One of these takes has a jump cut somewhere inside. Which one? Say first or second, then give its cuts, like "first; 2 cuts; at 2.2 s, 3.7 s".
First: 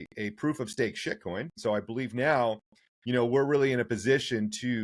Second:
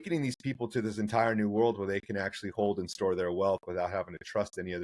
first; 1 cut; at 1.5 s